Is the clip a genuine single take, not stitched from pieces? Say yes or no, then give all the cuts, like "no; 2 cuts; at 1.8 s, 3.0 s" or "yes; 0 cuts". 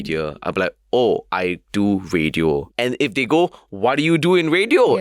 no; 2 cuts; at 1.3 s, 2.7 s